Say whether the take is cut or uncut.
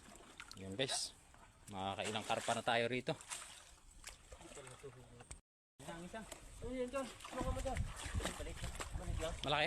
cut